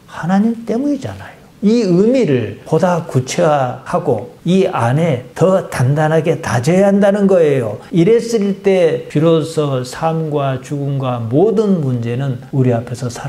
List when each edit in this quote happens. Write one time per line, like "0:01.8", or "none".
none